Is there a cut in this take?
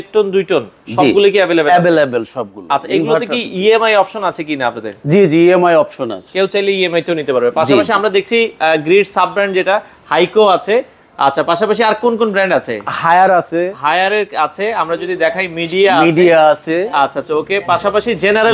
no; 0 cuts

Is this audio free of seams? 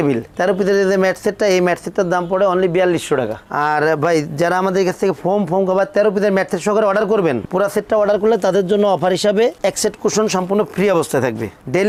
yes; 0 cuts

